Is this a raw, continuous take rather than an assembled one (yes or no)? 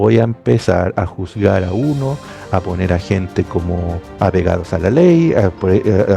no